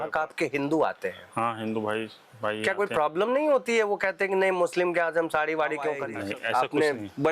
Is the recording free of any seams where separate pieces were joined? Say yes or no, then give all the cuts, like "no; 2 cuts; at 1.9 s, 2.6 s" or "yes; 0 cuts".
no; 1 cut; at 6.1 s